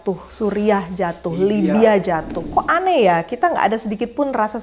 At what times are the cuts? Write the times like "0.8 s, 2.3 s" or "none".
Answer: 2.4 s